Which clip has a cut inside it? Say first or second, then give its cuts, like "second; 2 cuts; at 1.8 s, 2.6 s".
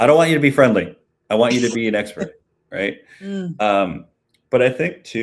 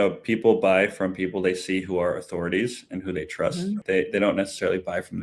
second; 1 cut; at 3.8 s